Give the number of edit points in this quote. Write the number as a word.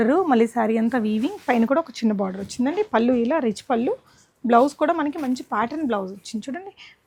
zero